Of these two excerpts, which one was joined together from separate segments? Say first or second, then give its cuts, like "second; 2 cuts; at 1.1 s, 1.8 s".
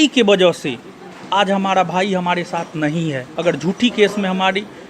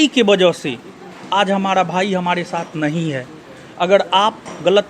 first; 1 cut; at 3.3 s